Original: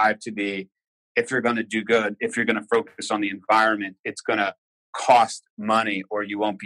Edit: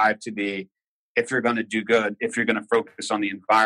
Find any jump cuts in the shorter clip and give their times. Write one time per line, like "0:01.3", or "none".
none